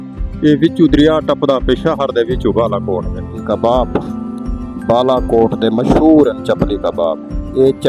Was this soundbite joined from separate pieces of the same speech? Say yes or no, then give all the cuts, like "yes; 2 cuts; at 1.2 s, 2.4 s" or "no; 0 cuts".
yes; 1 cut; at 3.4 s